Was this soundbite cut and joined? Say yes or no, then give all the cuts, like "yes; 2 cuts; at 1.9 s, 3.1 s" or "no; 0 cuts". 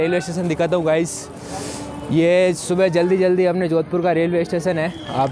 no; 0 cuts